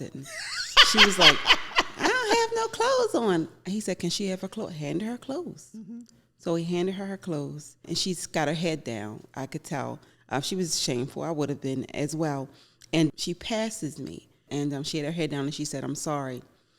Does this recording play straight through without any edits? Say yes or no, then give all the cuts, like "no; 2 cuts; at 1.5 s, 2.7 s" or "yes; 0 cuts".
no; 3 cuts; at 7.9 s, 13.1 s, 14.5 s